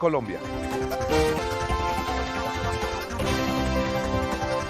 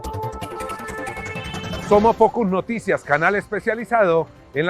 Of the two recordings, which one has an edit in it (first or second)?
first